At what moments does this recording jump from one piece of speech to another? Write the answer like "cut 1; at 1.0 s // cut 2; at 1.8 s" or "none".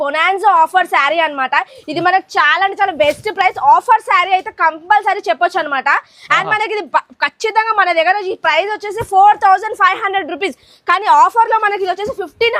none

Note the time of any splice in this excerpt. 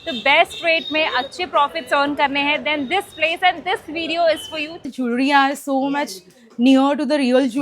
cut 1; at 4.9 s

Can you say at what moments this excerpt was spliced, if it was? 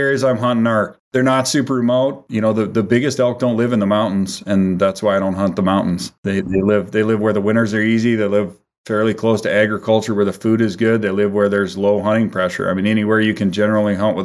cut 1; at 1.0 s // cut 2; at 2.2 s // cut 3; at 6.3 s

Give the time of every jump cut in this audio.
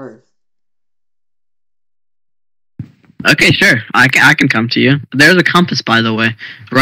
cut 1; at 3.4 s

